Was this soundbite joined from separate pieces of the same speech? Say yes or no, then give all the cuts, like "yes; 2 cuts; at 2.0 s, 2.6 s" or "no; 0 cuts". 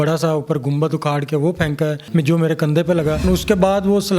yes; 2 cuts; at 2.0 s, 3.2 s